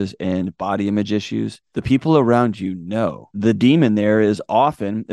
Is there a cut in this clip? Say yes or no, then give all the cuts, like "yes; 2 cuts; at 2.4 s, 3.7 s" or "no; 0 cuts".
yes; 2 cuts; at 1.6 s, 3.0 s